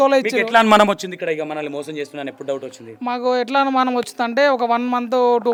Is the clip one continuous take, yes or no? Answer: yes